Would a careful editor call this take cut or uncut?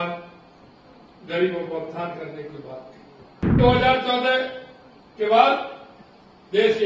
cut